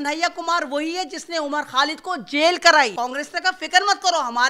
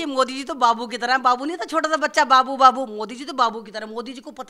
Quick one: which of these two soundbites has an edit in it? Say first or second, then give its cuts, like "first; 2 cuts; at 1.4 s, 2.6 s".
first; 1 cut; at 2.9 s